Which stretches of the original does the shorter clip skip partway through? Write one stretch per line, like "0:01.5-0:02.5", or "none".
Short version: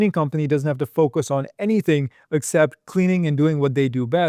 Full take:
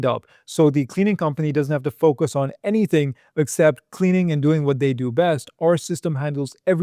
none